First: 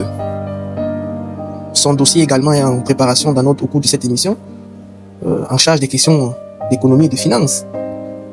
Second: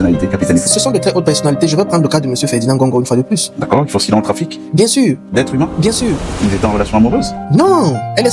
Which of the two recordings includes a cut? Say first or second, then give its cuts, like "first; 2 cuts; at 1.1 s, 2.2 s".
second; 1 cut; at 6.3 s